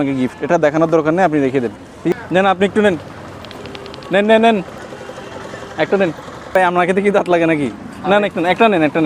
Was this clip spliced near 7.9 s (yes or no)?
no